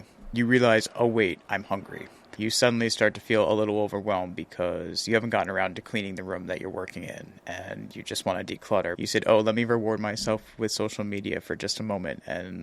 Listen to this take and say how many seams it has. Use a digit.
1